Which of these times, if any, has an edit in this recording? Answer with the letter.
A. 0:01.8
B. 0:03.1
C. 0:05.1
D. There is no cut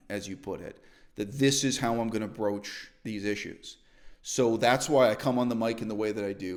D